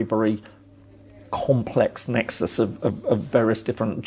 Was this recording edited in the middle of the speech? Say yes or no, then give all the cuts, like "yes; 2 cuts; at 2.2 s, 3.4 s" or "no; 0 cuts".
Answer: no; 0 cuts